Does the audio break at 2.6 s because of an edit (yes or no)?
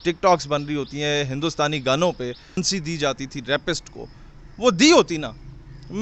yes